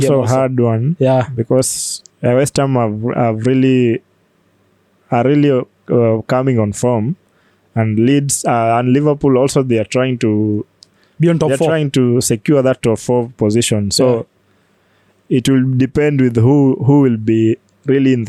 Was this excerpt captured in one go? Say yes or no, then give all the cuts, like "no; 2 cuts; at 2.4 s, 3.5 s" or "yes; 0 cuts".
yes; 0 cuts